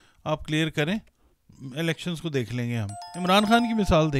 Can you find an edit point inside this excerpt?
yes; 1 cut; at 3.0 s

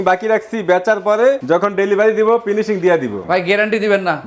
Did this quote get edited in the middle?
yes; 2 cuts; at 1.4 s, 3.2 s

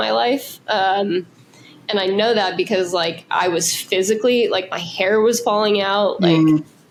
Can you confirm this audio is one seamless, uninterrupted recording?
yes; 0 cuts

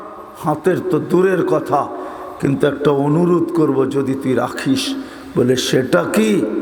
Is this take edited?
no; 0 cuts

